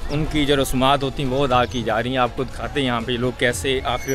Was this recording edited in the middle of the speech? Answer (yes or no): no